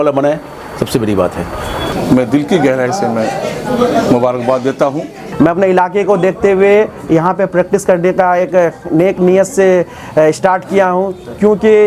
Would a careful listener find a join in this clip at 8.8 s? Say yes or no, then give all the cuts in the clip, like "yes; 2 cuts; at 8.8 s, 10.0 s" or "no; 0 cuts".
no; 2 cuts; at 1.9 s, 5.2 s